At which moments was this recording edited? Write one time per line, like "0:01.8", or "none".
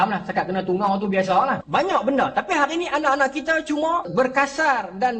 0:01.6
0:04.1